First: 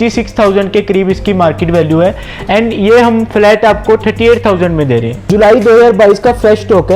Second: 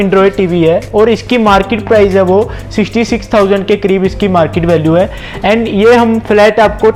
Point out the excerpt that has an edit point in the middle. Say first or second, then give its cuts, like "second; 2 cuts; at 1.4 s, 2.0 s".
first; 1 cut; at 5.2 s